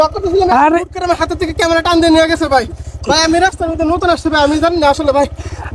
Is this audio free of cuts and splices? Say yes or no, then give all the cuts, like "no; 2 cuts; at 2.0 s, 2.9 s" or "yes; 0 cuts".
yes; 0 cuts